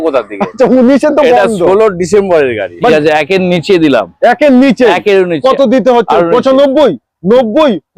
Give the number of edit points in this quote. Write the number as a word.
one